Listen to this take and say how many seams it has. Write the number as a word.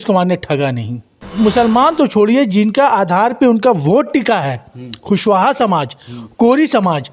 one